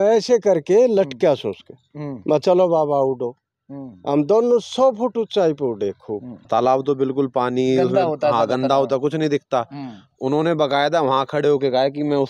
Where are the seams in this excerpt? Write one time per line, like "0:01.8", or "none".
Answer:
0:06.4